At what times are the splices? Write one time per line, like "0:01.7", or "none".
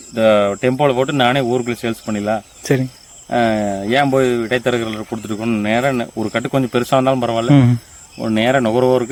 none